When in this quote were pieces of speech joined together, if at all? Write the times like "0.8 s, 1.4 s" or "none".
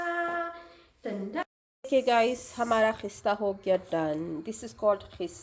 1.4 s